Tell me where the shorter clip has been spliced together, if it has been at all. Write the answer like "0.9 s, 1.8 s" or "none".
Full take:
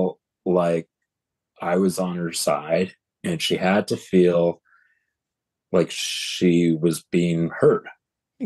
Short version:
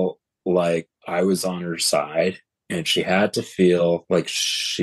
1.0 s, 4.0 s